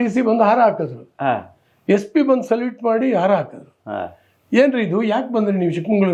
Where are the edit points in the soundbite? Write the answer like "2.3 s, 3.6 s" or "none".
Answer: none